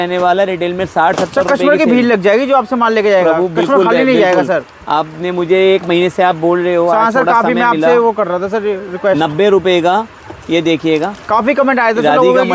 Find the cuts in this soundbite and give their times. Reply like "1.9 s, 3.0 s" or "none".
none